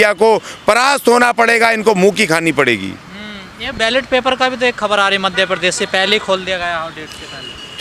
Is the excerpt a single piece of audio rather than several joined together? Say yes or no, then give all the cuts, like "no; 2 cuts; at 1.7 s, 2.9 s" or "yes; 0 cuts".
yes; 0 cuts